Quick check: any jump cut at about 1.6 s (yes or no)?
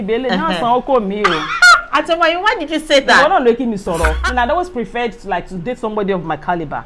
no